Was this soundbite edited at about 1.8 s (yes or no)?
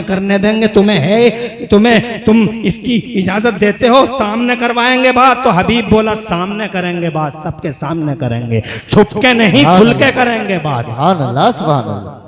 no